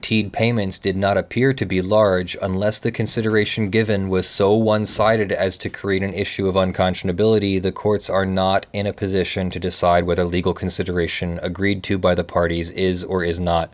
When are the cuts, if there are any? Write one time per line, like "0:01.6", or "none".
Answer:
none